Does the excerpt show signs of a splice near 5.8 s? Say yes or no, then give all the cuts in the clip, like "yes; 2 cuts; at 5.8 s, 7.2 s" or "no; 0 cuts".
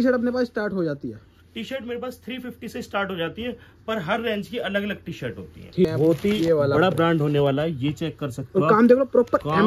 yes; 1 cut; at 5.8 s